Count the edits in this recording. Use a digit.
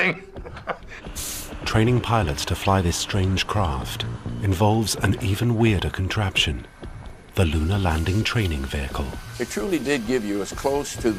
0